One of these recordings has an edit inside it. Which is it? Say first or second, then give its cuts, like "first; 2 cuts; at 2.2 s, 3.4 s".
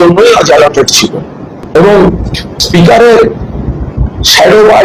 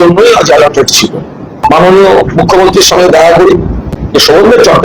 second; 1 cut; at 1.8 s